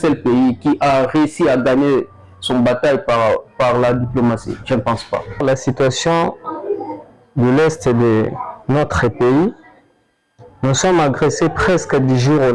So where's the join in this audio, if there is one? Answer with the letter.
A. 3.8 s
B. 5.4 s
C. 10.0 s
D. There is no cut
B